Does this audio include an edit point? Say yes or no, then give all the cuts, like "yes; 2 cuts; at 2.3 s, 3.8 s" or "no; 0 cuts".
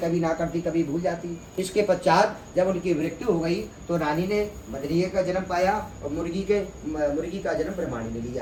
no; 0 cuts